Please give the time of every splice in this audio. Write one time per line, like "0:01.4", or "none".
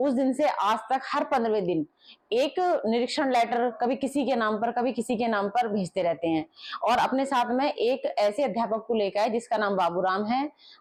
none